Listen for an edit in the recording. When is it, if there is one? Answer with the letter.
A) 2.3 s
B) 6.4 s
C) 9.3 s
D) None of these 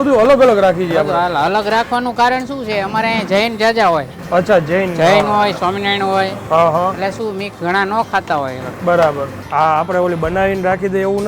C